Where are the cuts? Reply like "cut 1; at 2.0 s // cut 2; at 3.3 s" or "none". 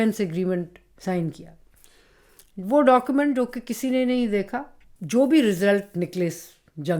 cut 1; at 4.9 s